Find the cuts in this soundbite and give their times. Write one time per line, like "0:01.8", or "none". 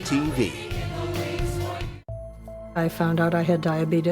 0:02.1